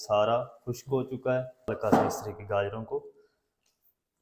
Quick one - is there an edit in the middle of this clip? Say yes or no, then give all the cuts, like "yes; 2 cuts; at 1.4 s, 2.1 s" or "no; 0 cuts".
yes; 1 cut; at 1.7 s